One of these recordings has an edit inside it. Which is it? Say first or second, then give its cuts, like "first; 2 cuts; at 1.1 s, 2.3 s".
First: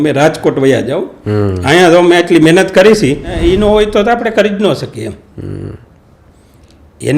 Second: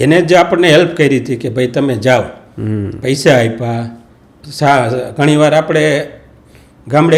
first; 1 cut; at 3.4 s